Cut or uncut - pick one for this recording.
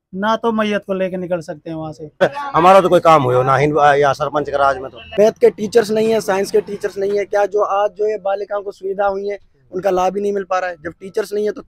cut